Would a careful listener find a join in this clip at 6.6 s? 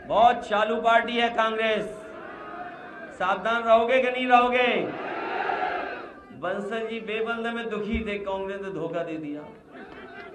no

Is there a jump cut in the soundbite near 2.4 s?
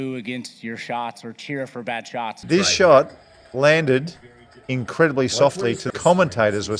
yes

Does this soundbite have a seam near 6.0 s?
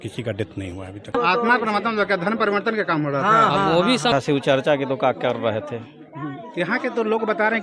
no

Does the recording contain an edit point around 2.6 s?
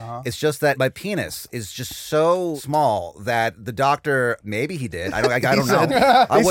yes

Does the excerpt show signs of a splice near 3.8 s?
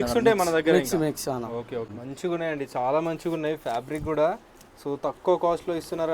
no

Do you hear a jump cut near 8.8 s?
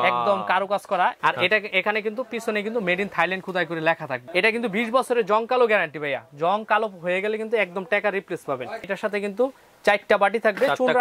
yes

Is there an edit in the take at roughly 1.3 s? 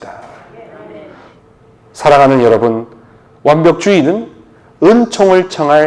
yes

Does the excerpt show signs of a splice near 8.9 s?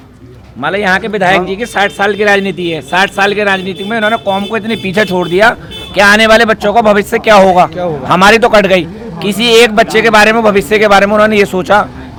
no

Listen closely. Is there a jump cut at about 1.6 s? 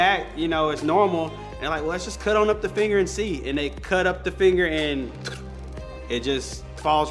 no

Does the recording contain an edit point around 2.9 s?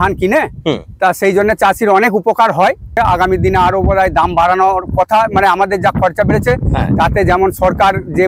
yes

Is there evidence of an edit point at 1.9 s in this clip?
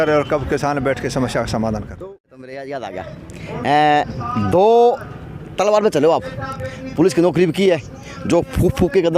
yes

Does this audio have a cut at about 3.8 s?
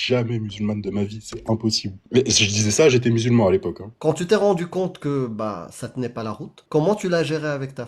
yes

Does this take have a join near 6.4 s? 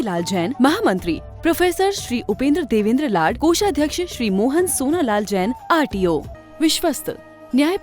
yes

